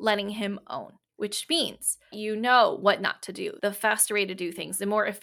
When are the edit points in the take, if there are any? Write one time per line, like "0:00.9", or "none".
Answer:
0:01.0
0:02.1
0:03.6